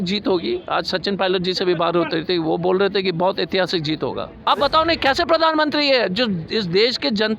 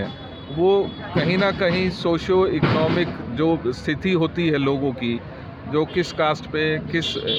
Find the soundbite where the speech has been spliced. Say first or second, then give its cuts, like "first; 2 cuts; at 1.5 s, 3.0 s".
first; 1 cut; at 4.4 s